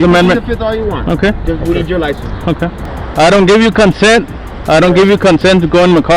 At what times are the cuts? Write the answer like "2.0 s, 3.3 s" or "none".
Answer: 2.9 s

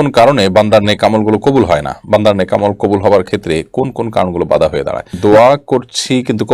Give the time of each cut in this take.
5.2 s

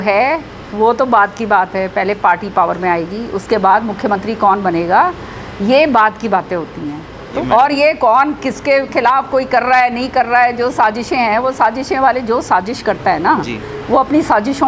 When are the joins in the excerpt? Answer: 7.4 s

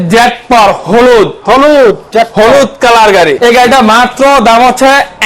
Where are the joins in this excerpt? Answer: 3.4 s

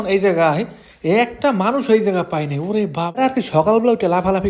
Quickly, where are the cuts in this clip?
3.2 s

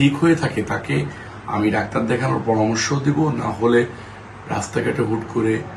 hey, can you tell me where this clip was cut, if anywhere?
none

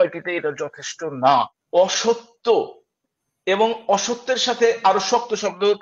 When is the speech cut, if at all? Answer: 1.5 s

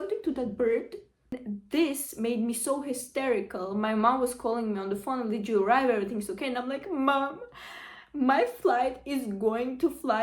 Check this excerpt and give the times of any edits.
1.1 s

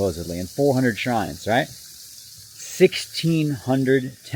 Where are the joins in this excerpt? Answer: none

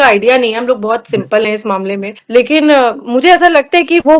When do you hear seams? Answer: 2.1 s

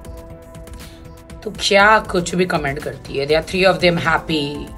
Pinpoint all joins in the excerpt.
none

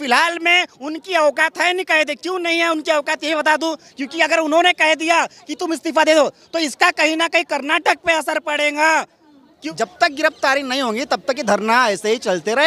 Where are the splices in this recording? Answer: 9.5 s

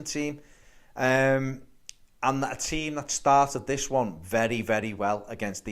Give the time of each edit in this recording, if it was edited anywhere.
2.3 s

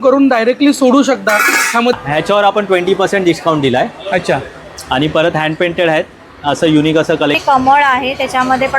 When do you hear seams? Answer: 1.9 s, 7.4 s

